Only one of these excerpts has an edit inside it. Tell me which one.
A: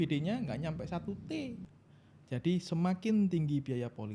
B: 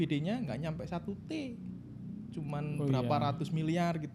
A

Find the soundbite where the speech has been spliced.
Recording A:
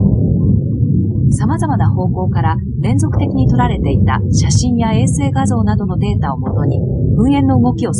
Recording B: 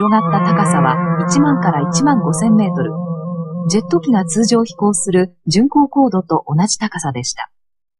A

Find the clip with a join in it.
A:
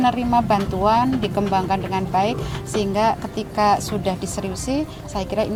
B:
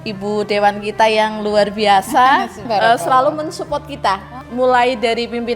B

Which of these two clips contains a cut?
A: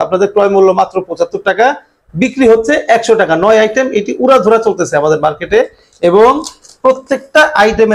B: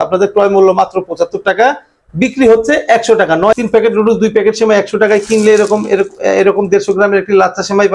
B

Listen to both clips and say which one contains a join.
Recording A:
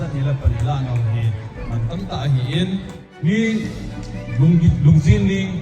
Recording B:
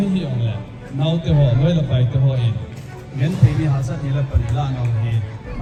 A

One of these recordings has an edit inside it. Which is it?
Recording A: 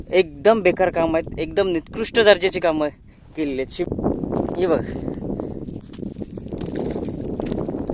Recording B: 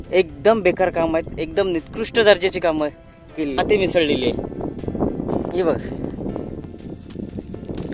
A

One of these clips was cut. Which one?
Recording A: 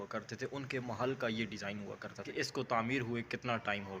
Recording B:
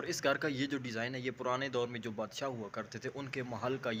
A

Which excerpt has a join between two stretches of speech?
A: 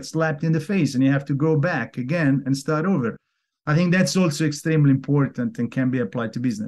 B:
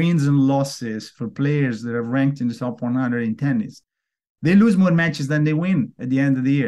A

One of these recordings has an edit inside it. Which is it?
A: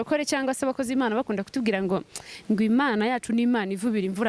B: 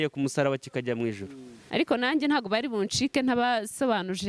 B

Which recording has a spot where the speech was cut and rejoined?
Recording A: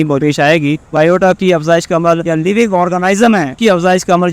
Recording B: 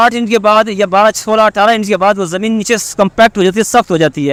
A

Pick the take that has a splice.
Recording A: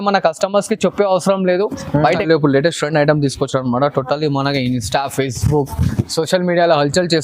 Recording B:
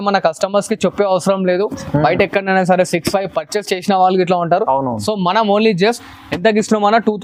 A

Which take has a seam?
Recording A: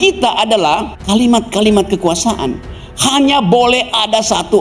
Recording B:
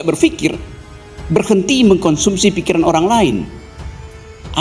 A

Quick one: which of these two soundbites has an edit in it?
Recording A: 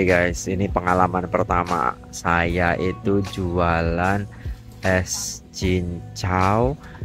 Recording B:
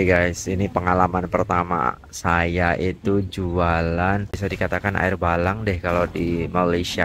B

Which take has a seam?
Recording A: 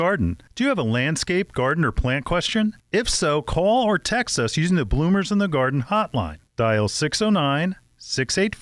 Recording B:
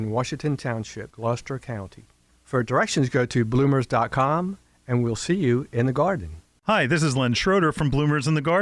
B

